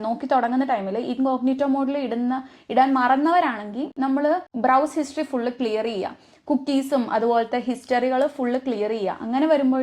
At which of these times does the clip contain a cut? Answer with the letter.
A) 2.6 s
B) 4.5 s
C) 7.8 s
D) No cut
B